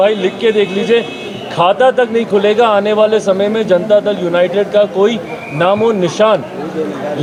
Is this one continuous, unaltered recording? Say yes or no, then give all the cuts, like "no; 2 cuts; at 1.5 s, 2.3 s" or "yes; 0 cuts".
yes; 0 cuts